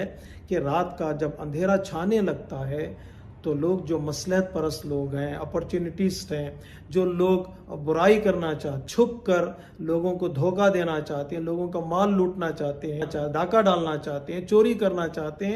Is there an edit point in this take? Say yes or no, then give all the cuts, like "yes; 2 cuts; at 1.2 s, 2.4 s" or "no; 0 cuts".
yes; 2 cuts; at 8.7 s, 13.1 s